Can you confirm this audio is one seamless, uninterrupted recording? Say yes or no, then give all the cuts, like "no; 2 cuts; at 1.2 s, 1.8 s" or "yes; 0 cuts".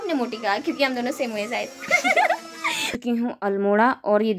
no; 1 cut; at 2.9 s